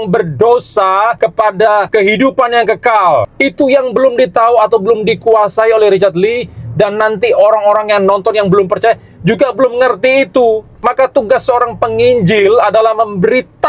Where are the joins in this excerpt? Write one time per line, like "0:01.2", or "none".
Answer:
0:01.6
0:03.3
0:10.7